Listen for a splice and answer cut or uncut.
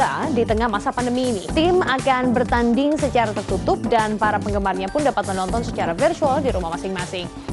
uncut